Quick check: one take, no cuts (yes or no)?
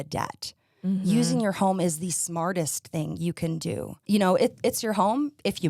no